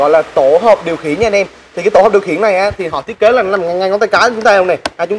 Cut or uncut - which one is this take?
uncut